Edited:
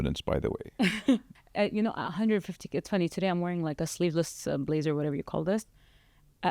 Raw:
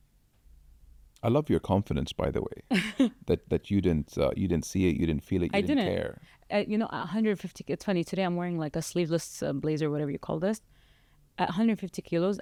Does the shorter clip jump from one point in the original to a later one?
yes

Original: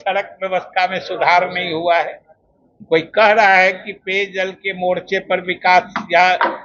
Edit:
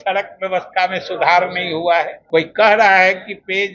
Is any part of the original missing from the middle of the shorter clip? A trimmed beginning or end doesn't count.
yes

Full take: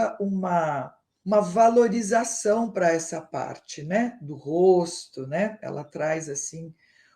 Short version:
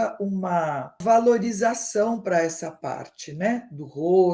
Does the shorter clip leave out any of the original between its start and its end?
yes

